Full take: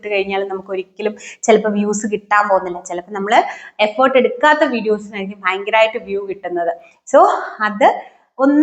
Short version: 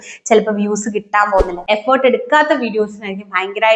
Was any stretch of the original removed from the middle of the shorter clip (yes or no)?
yes